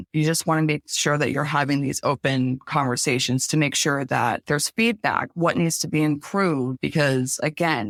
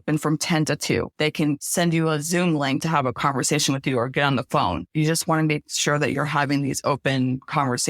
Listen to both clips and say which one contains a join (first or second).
second